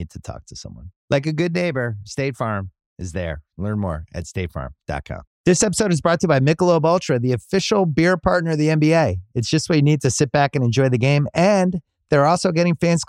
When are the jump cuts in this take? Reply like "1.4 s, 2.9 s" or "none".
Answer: 5.3 s